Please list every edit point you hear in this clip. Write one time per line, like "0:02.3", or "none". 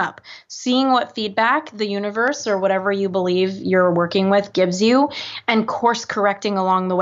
none